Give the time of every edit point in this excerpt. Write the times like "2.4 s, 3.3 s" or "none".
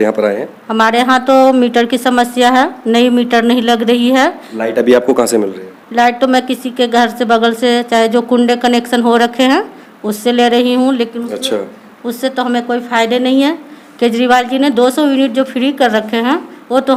none